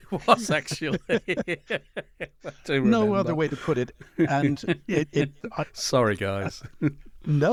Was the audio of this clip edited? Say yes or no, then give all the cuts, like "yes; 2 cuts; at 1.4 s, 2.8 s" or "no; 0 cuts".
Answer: no; 0 cuts